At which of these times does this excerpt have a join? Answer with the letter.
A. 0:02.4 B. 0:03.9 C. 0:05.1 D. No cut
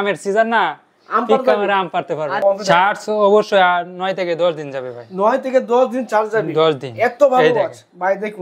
A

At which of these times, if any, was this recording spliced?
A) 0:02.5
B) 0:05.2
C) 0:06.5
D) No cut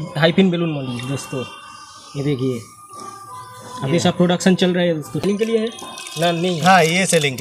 B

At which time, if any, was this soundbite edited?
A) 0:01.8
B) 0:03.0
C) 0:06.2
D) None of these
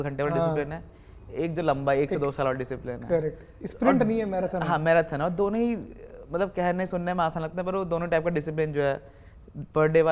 D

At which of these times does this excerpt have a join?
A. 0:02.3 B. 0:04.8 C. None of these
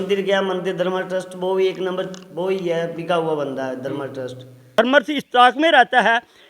B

